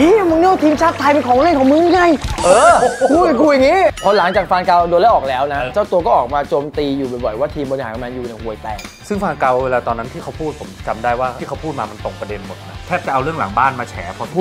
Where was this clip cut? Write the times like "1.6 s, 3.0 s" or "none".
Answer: 4.0 s, 5.7 s, 11.4 s

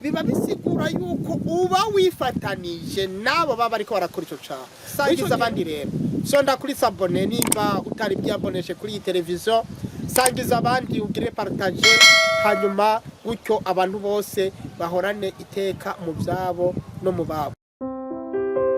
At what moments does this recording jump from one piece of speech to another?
5.2 s, 17.8 s

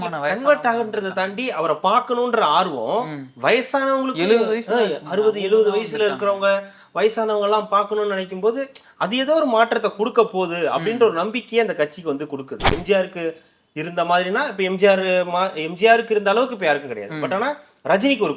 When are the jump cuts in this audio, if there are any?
12.7 s

